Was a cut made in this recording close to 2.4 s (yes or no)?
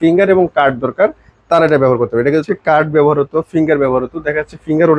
yes